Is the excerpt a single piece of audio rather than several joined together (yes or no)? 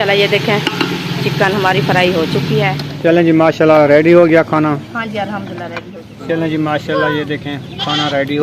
no